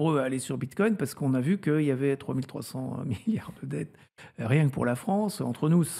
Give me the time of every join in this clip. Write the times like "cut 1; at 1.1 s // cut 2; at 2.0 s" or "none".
none

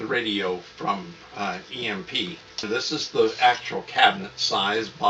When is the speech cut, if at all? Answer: cut 1; at 2.6 s

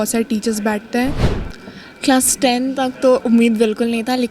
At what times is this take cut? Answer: cut 1; at 1.3 s

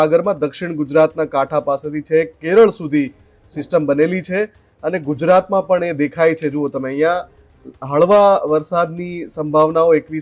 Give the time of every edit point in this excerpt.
none

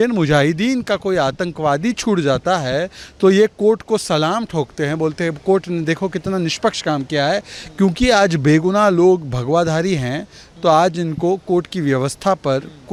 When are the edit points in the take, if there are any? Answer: none

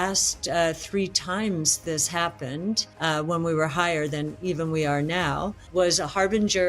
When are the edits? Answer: cut 1; at 5.6 s

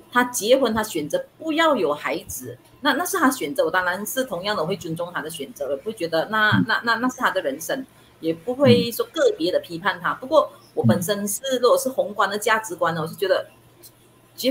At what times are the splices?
none

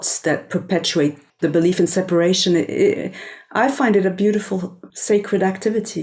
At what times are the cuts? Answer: cut 1; at 1.3 s // cut 2; at 4.8 s

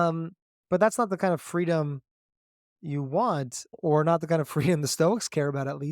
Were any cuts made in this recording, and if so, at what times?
cut 1; at 3.7 s

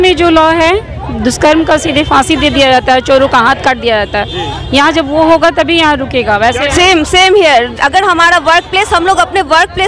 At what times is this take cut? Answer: cut 1; at 6.7 s

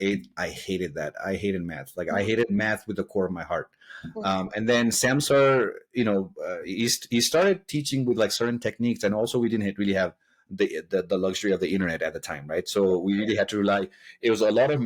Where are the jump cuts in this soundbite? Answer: none

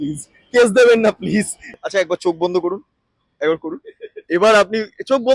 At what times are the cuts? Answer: cut 1; at 1.7 s

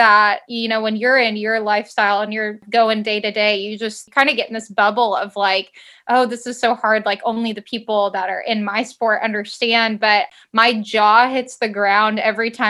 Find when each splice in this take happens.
cut 1; at 2.6 s // cut 2; at 4.0 s // cut 3; at 10.3 s

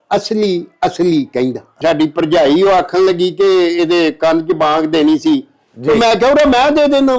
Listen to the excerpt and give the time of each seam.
cut 1; at 1.8 s

